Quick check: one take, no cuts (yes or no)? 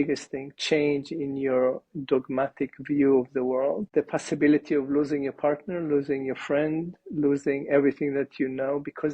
no